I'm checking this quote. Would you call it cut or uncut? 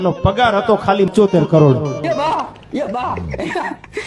cut